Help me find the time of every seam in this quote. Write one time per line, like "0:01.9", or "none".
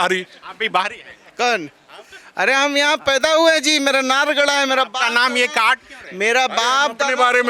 none